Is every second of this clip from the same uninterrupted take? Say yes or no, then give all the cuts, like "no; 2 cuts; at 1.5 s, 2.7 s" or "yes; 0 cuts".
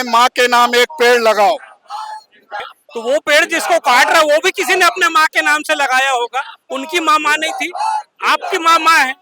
no; 1 cut; at 2.5 s